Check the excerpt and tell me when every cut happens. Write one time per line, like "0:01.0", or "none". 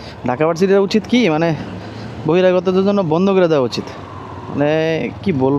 none